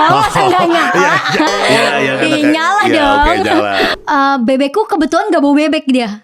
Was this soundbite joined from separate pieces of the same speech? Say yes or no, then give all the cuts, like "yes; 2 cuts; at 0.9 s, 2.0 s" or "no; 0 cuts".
yes; 1 cut; at 3.9 s